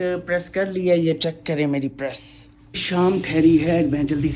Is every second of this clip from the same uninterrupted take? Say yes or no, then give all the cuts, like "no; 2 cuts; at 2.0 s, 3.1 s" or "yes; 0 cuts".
no; 1 cut; at 2.8 s